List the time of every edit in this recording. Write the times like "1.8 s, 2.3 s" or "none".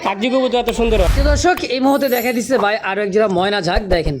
1.1 s